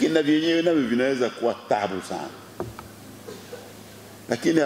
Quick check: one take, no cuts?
yes; 0 cuts

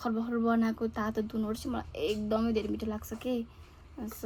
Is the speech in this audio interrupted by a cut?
no; 0 cuts

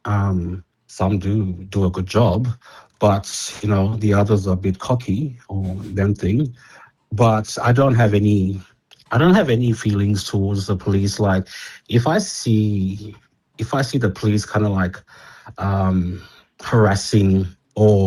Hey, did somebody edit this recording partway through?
no; 0 cuts

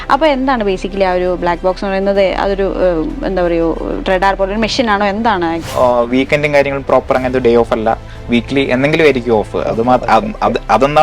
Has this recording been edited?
yes; 1 cut; at 5.6 s

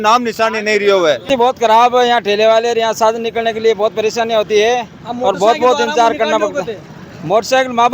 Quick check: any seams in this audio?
yes; 1 cut; at 1.4 s

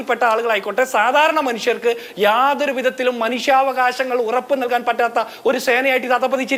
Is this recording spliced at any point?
no; 0 cuts

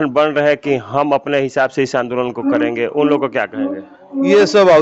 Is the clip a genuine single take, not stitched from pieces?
yes; 0 cuts

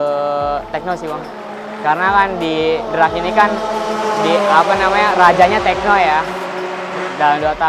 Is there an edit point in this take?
no; 0 cuts

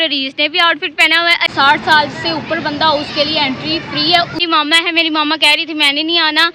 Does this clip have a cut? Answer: yes; 2 cuts; at 1.5 s, 4.3 s

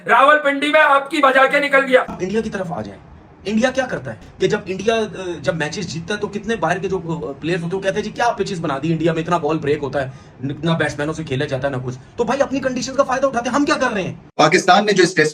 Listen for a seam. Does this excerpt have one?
yes; 3 cuts; at 2.1 s, 4.1 s, 14.3 s

